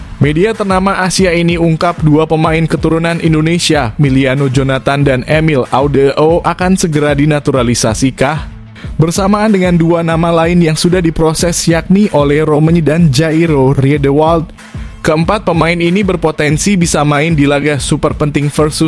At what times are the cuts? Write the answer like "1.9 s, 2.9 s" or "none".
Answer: none